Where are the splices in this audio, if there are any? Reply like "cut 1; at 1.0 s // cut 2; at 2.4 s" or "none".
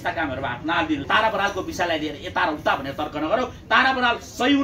cut 1; at 1.0 s